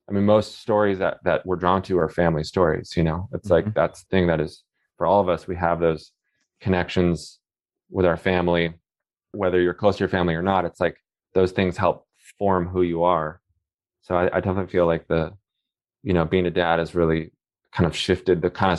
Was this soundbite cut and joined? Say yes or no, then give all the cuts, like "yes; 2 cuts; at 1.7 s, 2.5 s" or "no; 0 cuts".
yes; 2 cuts; at 4.0 s, 9.3 s